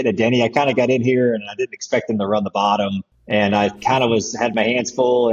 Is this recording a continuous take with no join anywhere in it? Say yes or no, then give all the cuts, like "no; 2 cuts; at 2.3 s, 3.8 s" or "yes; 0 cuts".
no; 1 cut; at 3.1 s